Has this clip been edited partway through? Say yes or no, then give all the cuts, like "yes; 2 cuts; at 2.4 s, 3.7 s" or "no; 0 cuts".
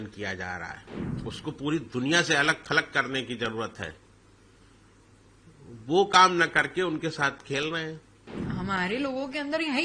yes; 2 cuts; at 0.8 s, 8.4 s